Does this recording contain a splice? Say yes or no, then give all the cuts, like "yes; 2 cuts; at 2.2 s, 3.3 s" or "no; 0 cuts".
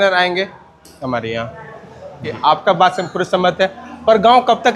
yes; 1 cut; at 2.4 s